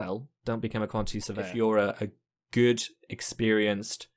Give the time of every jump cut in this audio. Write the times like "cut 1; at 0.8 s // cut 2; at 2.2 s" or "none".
cut 1; at 1.5 s